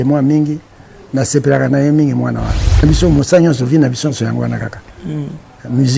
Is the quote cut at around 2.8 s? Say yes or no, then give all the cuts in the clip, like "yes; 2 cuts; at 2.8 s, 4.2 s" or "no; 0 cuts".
yes; 1 cut; at 2.8 s